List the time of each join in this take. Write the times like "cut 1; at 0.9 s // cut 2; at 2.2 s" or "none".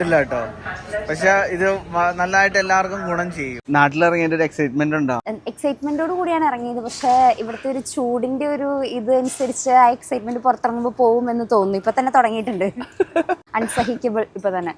cut 1; at 3.6 s // cut 2; at 5.3 s // cut 3; at 13.4 s